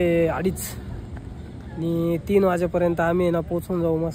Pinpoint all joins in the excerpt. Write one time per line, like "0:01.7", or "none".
none